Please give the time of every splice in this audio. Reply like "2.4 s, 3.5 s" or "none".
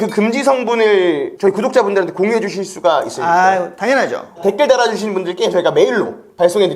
4.4 s